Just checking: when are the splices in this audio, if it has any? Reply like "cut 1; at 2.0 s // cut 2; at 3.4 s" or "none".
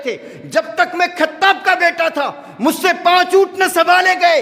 none